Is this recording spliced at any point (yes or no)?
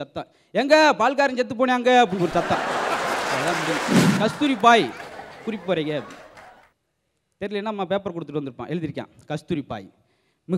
yes